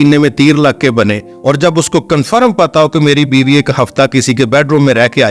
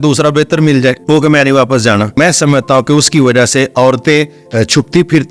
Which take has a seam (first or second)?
second